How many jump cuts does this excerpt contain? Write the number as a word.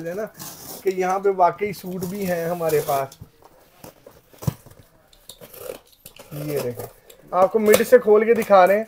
zero